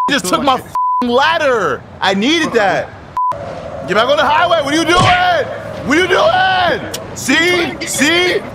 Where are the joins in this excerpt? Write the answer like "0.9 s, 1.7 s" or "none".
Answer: 3.3 s